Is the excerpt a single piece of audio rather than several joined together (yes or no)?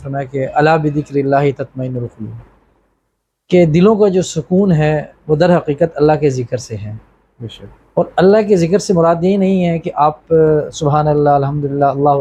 yes